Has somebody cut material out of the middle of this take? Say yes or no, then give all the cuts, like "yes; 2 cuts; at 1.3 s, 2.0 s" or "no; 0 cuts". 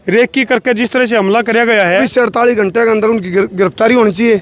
yes; 1 cut; at 2.0 s